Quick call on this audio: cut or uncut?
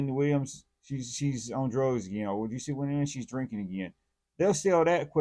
uncut